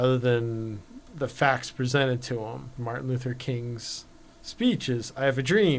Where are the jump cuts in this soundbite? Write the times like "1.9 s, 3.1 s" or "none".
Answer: 2.7 s